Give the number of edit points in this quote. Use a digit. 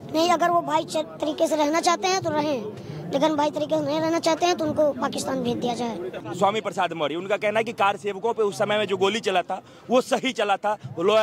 1